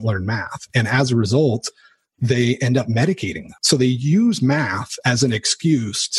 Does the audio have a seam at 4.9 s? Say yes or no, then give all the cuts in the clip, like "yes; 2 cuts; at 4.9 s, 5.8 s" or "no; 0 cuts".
no; 1 cut; at 3.6 s